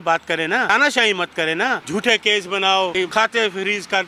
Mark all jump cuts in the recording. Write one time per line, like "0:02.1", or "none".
0:00.7
0:01.8
0:03.0